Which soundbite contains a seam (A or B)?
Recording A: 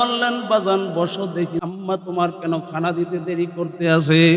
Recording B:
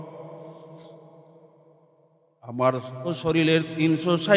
A